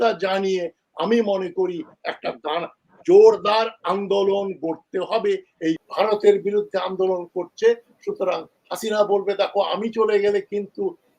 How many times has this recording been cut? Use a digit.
1